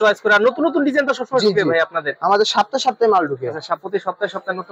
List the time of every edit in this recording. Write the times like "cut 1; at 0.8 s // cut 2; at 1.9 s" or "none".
none